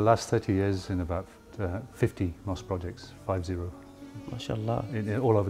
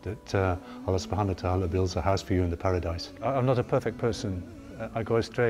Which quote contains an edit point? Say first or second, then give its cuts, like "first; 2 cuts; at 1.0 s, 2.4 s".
second; 1 cut; at 3.1 s